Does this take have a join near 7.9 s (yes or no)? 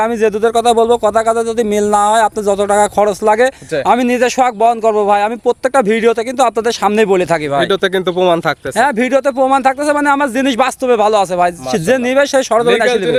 no